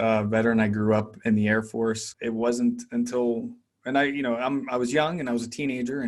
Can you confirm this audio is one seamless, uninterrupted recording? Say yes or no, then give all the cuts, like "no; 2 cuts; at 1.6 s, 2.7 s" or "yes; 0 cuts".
no; 1 cut; at 2.1 s